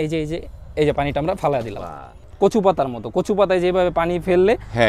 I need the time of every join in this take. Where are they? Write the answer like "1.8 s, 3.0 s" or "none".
2.2 s